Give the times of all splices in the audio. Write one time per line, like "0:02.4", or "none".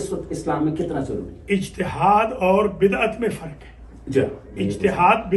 none